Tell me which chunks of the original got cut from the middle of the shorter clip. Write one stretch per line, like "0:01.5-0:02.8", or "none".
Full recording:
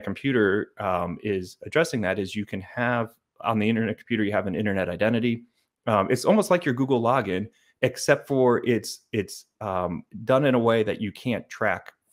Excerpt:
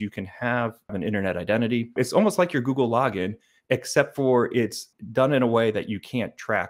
0:03.3-0:04.5
0:05.5-0:06.1
0:09.0-0:10.0